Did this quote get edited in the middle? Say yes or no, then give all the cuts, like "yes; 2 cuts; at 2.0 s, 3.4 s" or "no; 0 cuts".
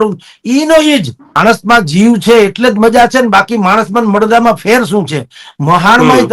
yes; 1 cut; at 1.2 s